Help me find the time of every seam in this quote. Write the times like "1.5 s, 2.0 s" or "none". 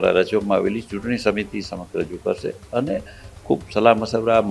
none